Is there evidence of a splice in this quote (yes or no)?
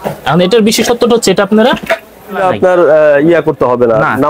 no